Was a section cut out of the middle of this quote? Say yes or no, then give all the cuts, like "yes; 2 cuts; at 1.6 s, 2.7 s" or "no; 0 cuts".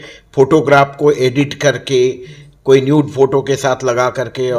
no; 0 cuts